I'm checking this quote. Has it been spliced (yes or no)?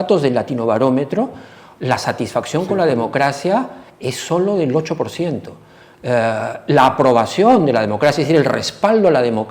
no